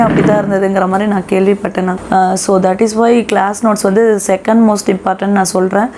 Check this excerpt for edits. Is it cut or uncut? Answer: cut